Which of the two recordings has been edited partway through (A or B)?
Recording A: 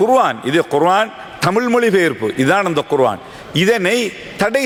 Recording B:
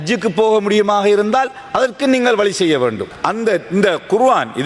B